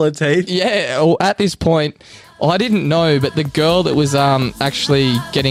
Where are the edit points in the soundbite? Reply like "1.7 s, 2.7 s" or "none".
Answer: none